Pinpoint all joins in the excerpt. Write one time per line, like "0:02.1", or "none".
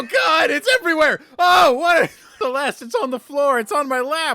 0:02.2